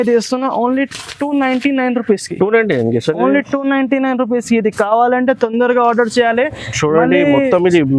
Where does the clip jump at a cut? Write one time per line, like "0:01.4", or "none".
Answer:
none